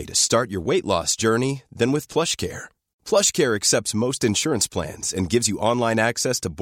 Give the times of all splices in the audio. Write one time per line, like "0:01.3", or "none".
none